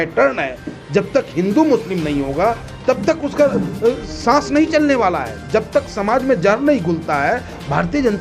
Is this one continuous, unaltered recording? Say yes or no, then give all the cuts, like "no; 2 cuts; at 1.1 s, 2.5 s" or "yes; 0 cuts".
yes; 0 cuts